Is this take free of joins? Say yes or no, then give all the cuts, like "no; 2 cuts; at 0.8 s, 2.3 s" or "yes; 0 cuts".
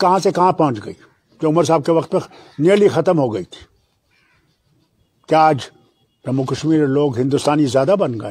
yes; 0 cuts